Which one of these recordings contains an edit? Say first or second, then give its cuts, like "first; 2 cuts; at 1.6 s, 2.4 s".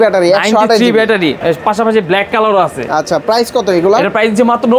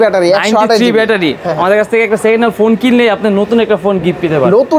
second; 1 cut; at 1.4 s